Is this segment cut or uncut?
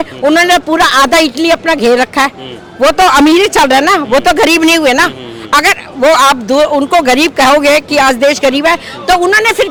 uncut